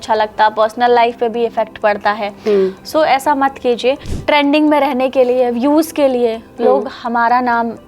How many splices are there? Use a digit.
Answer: 1